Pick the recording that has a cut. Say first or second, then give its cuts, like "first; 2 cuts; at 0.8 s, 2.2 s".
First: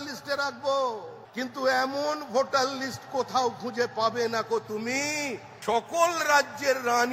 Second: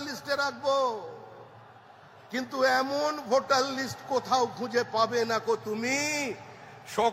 first; 2 cuts; at 1.2 s, 5.5 s